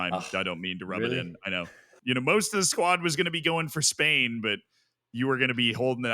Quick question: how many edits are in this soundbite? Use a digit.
1